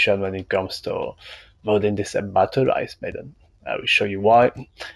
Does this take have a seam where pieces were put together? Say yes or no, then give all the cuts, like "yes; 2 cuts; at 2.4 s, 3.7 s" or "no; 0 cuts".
no; 0 cuts